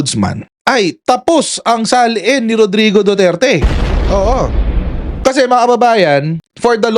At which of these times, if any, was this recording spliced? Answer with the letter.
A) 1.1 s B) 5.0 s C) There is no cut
B